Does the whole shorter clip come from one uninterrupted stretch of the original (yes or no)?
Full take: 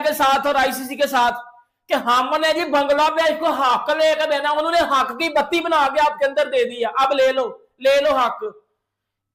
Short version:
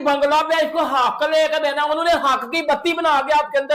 yes